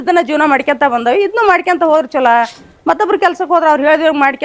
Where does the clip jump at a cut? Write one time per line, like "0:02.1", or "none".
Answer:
none

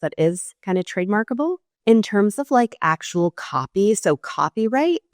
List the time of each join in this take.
0:01.7

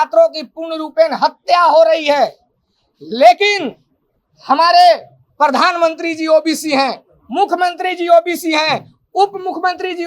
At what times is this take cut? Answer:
none

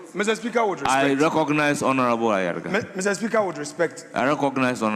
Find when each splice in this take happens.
none

